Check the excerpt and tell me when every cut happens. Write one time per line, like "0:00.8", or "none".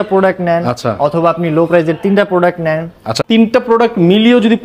0:03.1